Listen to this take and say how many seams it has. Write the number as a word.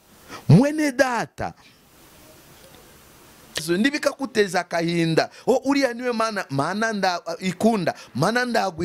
one